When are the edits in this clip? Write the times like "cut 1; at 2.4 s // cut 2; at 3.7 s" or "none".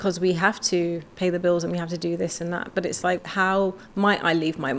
cut 1; at 3.2 s